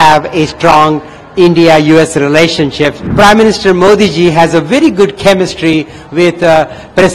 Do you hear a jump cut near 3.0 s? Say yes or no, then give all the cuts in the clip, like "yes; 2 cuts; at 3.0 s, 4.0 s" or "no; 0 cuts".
yes; 1 cut; at 3.0 s